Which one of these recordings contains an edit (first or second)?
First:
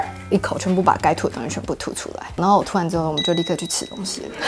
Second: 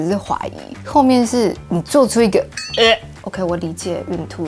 second